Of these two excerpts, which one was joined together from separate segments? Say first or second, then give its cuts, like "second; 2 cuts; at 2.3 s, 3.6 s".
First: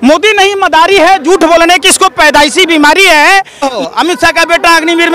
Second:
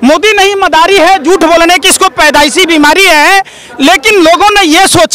first; 1 cut; at 3.7 s